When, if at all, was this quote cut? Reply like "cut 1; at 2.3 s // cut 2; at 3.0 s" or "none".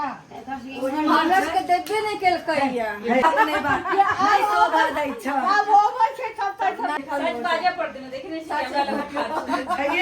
cut 1; at 3.2 s // cut 2; at 7.0 s